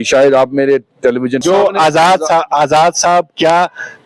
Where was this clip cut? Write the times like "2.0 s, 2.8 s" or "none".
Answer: 1.4 s